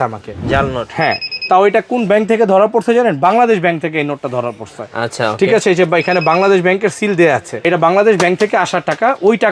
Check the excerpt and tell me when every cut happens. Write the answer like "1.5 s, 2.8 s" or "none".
7.5 s